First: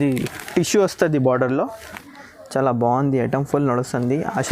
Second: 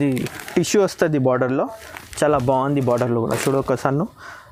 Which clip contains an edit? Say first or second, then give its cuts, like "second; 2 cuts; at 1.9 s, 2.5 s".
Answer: first; 1 cut; at 2.0 s